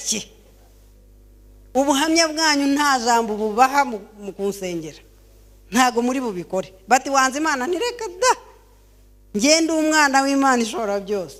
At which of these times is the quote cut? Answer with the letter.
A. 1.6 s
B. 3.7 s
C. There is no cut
C